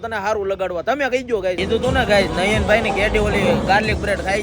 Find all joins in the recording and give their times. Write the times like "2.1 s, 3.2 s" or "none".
1.6 s